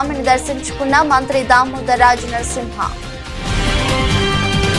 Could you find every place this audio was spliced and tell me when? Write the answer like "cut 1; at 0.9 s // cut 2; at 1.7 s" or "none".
none